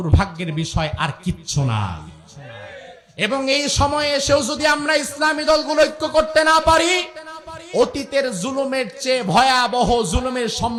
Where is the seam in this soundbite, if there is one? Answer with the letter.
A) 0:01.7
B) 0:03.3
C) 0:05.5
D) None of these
D